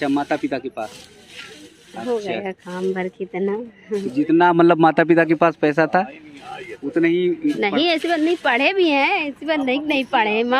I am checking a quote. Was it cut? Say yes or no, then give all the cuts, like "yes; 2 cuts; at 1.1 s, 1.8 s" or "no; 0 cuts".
no; 0 cuts